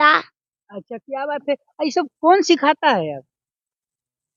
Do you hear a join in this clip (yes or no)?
no